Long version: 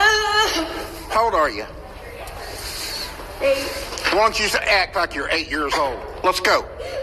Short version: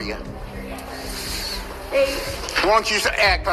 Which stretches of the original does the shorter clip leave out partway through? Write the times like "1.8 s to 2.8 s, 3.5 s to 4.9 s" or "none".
none